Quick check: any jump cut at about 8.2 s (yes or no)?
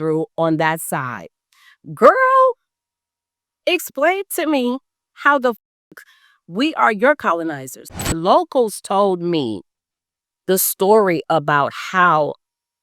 yes